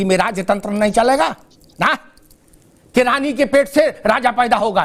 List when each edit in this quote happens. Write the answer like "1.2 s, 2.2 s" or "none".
none